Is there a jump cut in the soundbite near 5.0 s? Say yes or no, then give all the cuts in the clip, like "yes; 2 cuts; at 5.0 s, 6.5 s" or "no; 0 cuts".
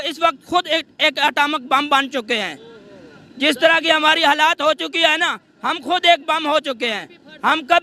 no; 0 cuts